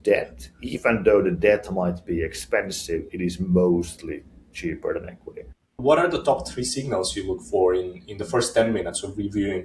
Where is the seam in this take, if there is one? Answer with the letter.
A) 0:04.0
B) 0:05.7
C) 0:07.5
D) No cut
B